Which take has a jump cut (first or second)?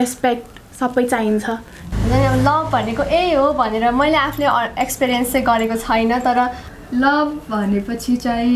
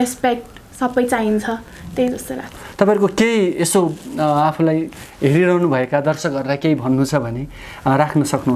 first